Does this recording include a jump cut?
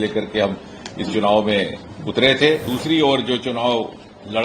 yes; 1 cut; at 2.7 s

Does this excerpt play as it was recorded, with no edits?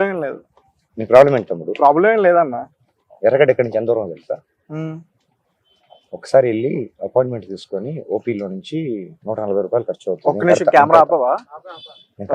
yes; 0 cuts

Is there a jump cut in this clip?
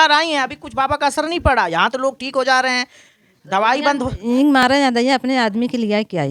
no; 0 cuts

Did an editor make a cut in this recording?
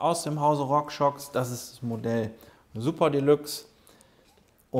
no; 0 cuts

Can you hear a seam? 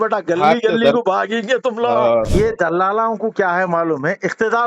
yes; 1 cut; at 2.3 s

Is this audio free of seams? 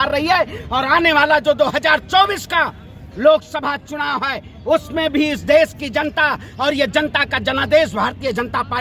yes; 0 cuts

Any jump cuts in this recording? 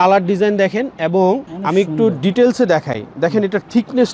no; 0 cuts

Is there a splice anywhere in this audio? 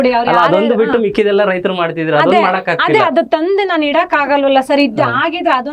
no; 0 cuts

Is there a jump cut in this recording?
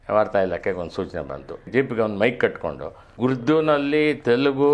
yes; 2 cuts; at 1.6 s, 3.1 s

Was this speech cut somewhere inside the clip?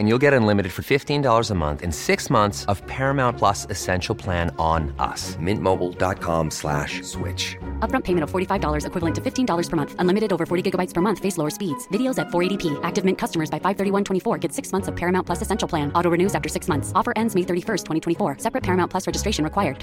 no; 0 cuts

